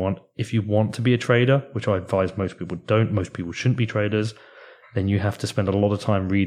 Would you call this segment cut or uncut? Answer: uncut